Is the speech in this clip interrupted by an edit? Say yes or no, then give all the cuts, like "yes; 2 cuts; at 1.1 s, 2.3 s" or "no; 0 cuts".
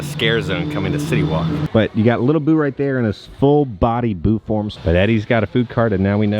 yes; 2 cuts; at 1.6 s, 4.7 s